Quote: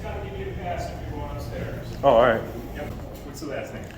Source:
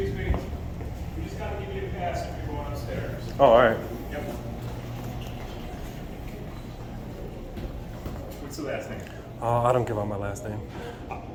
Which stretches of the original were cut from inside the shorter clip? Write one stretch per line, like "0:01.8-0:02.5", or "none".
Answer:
0:04.3-0:08.1